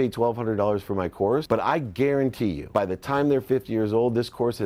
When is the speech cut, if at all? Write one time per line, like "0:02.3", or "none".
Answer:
0:01.4
0:02.6